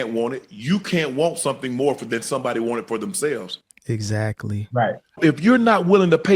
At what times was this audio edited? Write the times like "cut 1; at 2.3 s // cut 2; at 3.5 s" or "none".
cut 1; at 5.2 s